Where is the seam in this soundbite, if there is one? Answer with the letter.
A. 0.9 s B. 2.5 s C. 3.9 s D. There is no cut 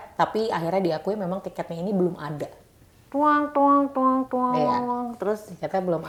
D